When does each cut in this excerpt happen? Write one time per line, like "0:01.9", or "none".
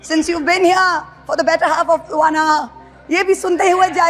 none